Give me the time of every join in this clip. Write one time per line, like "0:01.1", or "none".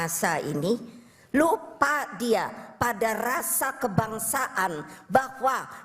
none